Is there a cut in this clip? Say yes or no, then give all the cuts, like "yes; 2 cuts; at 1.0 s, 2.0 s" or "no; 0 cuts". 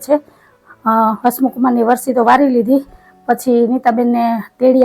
no; 0 cuts